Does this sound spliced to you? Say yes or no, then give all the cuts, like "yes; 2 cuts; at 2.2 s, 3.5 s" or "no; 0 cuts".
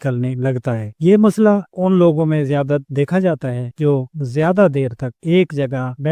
no; 0 cuts